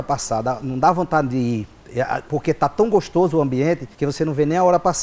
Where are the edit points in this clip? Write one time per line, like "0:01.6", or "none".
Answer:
0:02.2
0:03.9